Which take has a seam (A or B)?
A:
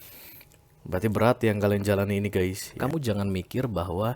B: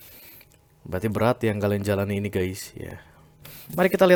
A